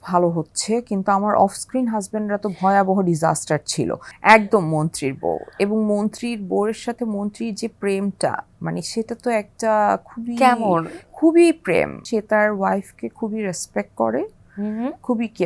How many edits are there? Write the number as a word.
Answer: two